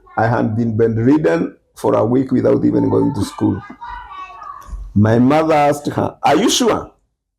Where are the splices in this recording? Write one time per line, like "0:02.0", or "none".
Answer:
none